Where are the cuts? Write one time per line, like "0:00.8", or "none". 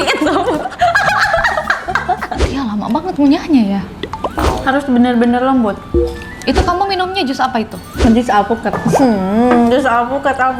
0:02.5